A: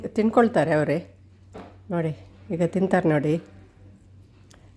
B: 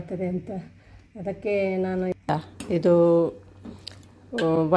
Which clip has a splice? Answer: B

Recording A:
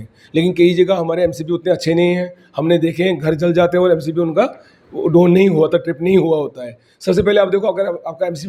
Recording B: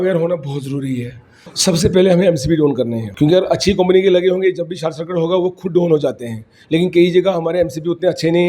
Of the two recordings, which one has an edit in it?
B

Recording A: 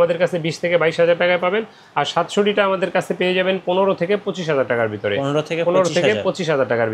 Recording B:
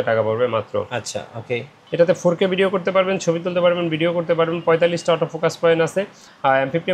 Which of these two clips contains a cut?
B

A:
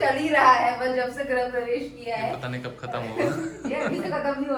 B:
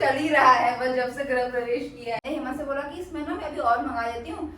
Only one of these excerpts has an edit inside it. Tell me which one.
B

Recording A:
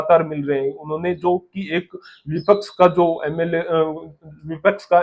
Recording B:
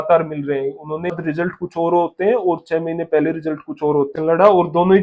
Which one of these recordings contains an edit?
B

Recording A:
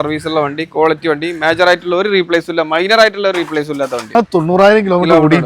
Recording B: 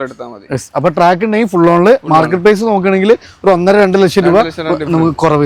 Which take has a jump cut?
A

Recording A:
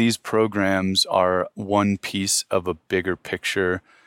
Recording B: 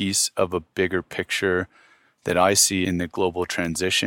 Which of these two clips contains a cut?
B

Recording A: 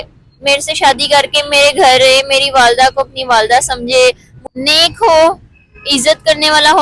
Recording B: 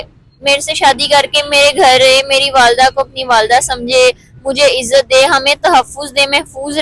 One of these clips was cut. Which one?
A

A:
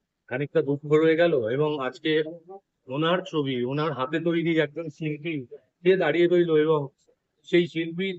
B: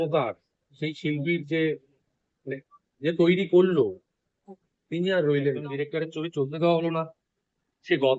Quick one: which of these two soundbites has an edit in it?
B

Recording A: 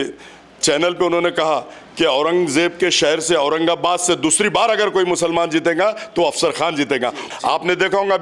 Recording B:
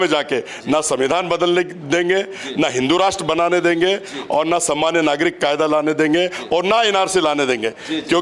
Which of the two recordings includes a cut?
A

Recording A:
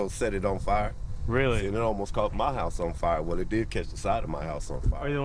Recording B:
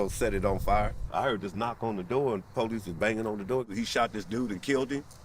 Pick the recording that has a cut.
B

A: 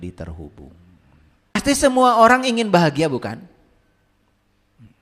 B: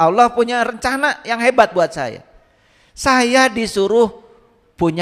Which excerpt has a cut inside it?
A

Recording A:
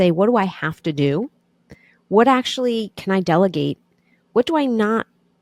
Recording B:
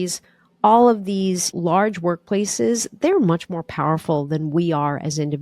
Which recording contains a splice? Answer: B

